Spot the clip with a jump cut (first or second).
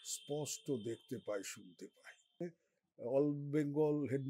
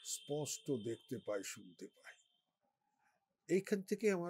first